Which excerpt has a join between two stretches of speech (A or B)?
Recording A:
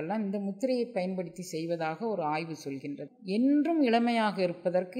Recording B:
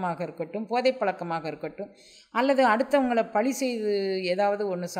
A